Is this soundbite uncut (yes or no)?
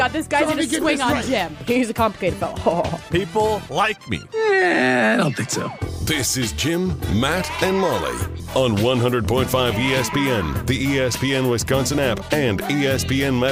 yes